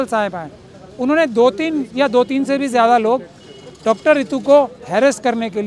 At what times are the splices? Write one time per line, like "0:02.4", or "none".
none